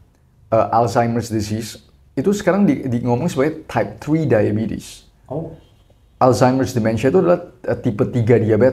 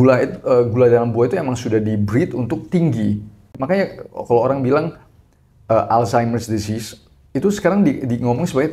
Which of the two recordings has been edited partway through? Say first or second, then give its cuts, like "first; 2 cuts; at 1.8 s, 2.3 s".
second; 1 cut; at 3.5 s